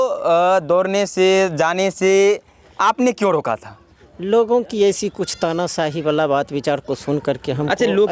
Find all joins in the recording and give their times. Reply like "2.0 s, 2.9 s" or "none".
none

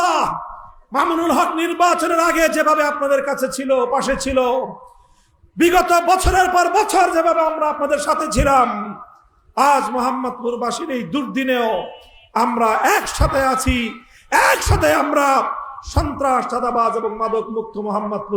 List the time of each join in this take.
none

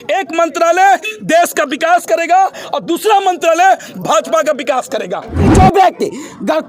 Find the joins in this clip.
5.5 s

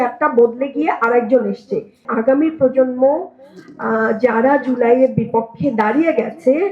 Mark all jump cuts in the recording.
2.1 s

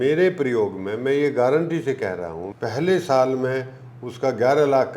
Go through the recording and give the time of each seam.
2.4 s

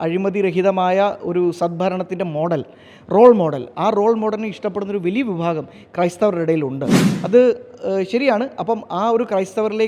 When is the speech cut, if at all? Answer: none

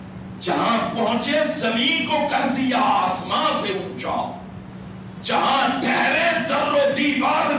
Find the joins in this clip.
4.7 s

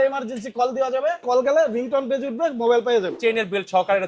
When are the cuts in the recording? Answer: 1.2 s, 3.2 s

